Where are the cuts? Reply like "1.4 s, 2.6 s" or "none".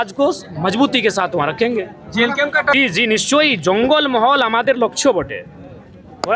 2.7 s